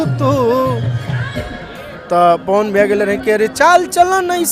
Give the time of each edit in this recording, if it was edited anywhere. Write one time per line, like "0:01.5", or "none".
none